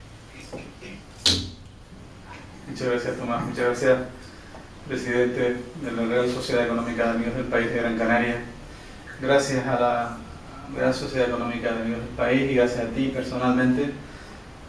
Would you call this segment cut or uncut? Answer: uncut